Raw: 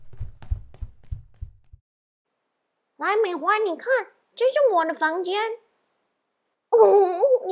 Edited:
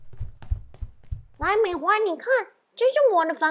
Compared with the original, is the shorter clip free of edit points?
no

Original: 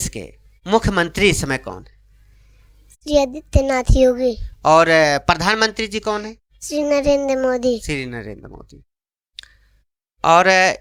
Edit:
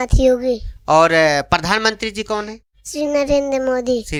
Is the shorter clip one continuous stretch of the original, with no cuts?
yes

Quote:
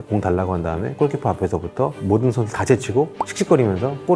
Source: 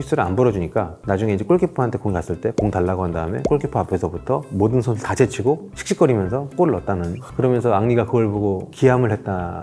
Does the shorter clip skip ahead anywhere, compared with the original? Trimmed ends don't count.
no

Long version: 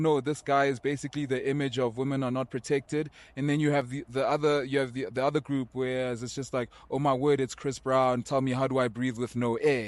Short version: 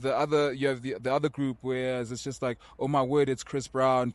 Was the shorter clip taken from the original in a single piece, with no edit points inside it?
yes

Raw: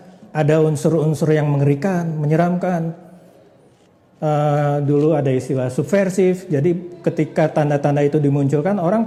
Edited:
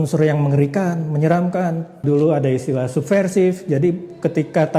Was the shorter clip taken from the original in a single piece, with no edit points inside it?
no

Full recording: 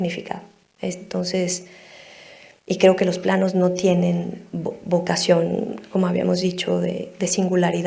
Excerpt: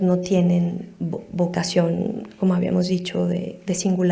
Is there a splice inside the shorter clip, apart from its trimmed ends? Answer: no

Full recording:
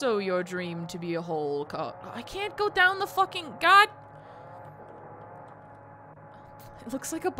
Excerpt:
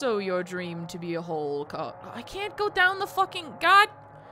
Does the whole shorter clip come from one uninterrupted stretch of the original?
yes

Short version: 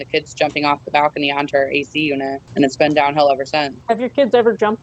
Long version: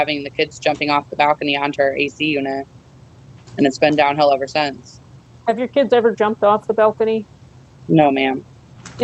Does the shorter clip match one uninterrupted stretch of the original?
no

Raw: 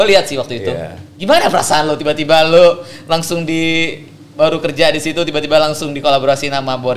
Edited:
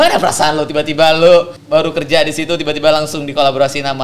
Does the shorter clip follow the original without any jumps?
no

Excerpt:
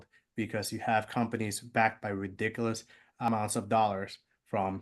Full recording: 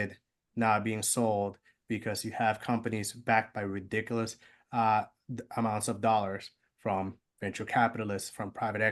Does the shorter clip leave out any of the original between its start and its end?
yes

